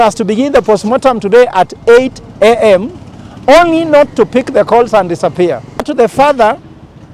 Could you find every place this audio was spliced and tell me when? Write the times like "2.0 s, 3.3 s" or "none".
5.9 s